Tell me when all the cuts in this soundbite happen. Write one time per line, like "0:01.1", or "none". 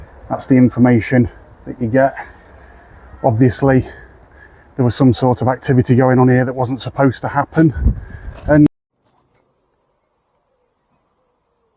0:08.7